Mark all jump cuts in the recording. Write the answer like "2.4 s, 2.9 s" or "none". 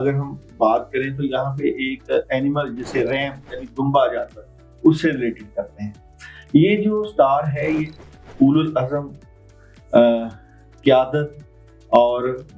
none

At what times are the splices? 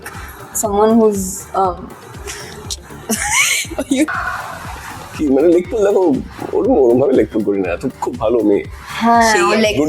4.1 s

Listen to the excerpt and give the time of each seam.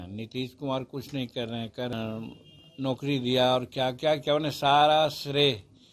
1.9 s

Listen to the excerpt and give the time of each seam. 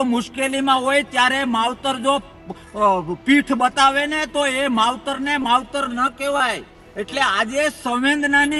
none

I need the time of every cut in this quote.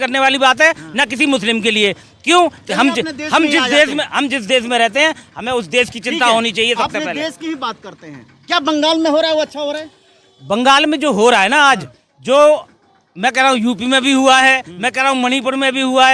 none

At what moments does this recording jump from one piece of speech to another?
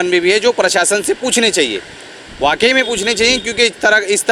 none

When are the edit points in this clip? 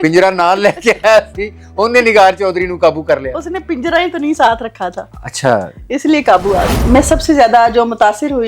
6.8 s

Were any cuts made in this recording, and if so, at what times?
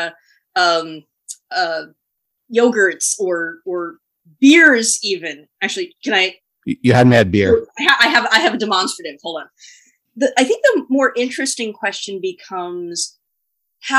10.0 s

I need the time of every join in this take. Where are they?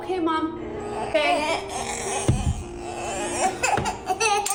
none

